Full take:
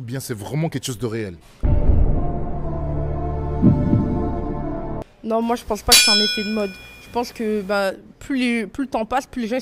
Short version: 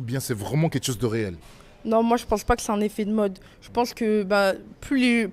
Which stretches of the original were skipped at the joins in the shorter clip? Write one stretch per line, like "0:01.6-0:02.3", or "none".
0:01.6-0:04.9